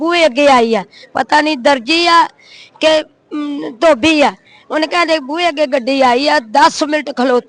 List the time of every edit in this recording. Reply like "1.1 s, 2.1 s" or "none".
none